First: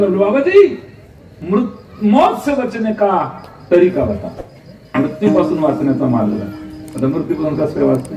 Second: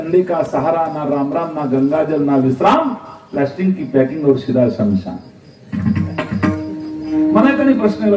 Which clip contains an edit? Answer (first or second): second